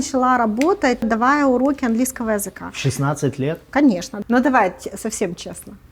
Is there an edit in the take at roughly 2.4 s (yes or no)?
no